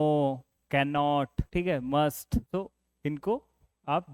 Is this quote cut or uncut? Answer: cut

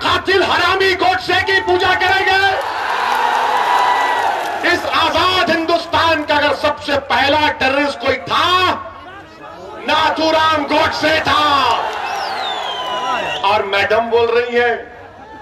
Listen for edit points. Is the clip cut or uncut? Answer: uncut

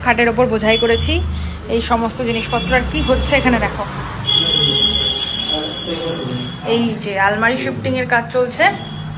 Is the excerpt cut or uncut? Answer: uncut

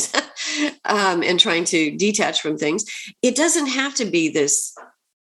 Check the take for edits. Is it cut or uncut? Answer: uncut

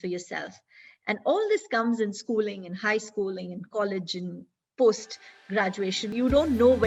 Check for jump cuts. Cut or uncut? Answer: uncut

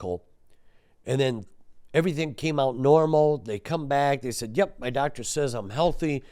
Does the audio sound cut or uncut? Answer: uncut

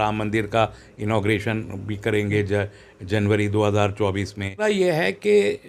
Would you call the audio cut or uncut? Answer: cut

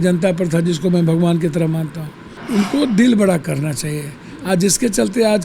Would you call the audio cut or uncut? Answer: cut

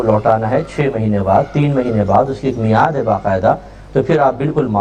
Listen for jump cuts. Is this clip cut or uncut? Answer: uncut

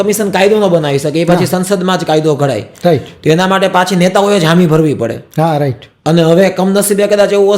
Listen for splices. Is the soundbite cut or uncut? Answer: uncut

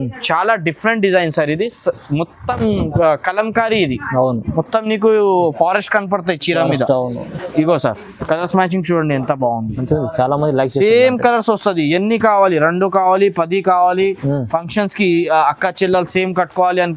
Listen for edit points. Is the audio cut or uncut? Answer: uncut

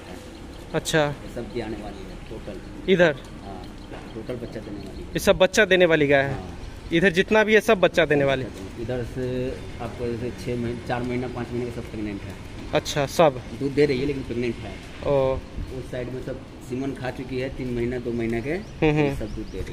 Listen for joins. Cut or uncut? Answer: uncut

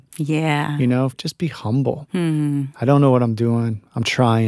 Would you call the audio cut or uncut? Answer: cut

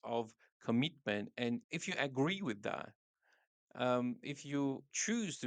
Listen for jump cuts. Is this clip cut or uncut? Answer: cut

